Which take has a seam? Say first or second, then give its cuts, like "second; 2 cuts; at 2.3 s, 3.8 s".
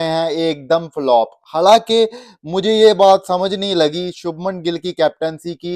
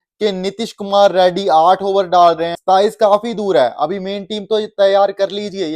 second; 1 cut; at 2.5 s